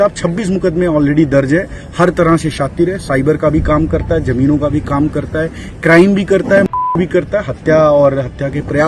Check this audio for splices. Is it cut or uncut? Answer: uncut